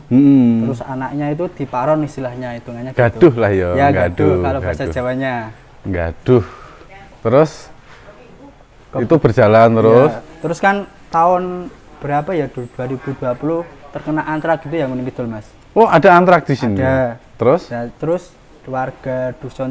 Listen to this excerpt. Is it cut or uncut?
uncut